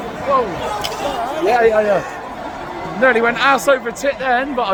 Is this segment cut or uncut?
uncut